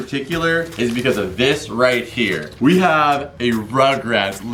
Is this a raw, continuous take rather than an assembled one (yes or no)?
no